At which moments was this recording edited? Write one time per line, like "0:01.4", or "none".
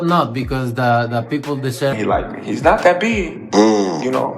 0:01.9